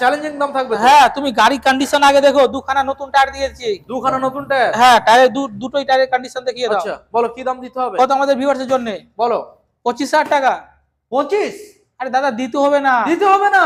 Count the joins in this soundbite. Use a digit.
0